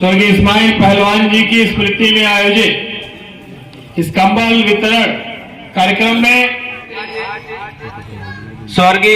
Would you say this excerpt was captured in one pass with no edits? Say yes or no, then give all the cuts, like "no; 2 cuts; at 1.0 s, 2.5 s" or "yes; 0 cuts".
no; 1 cut; at 7.2 s